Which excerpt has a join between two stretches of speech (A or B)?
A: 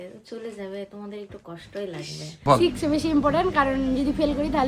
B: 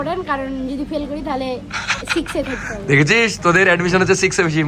A